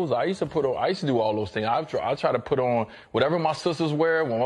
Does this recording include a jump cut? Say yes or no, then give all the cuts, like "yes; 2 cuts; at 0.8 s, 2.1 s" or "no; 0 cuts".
no; 0 cuts